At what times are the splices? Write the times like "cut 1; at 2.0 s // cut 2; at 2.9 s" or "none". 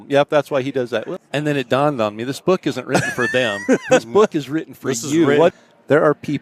cut 1; at 1.1 s // cut 2; at 5.6 s